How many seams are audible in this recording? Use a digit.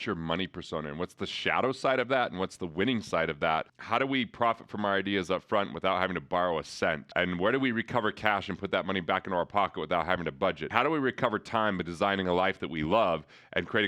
3